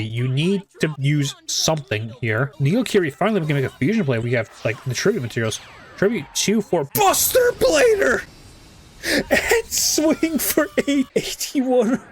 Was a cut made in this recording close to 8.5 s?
no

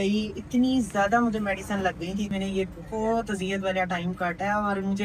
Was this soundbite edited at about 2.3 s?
yes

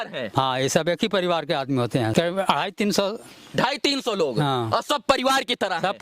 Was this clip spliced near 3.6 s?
no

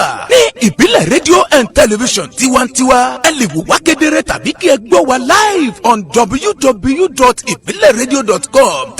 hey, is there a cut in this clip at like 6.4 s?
yes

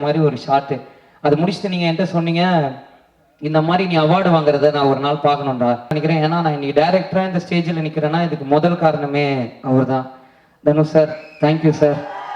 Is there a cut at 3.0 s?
no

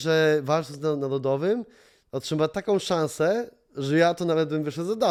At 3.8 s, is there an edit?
no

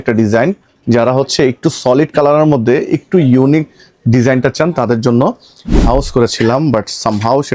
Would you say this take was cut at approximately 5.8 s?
yes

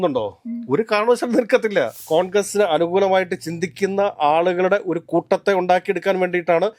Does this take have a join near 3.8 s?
no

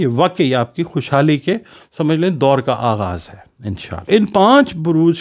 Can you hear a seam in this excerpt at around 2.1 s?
no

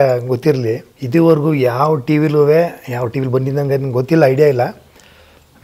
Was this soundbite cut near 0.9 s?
yes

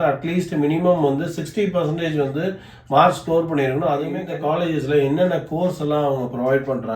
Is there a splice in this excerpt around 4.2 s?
yes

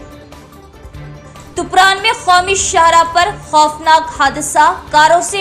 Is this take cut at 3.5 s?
no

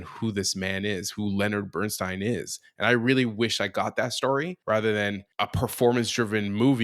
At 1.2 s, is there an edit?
no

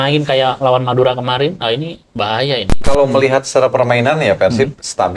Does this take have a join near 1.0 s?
no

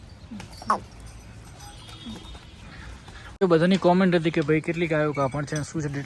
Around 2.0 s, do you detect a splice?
no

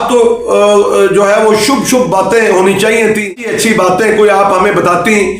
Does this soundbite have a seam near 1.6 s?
no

